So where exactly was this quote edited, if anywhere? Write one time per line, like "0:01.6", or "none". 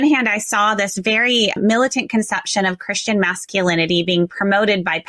0:01.6